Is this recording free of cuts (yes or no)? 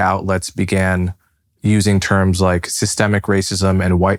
yes